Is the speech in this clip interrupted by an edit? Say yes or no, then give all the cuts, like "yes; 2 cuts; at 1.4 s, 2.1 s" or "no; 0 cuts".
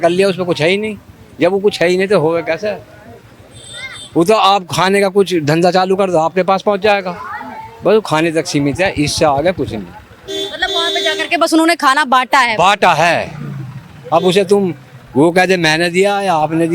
no; 0 cuts